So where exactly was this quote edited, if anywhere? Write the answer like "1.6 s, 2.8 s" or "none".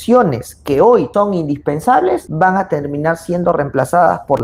none